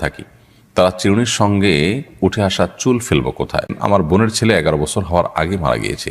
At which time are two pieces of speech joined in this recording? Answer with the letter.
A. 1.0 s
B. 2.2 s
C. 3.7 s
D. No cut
C